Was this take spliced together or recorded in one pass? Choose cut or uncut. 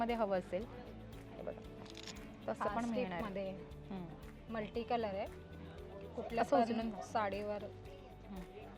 uncut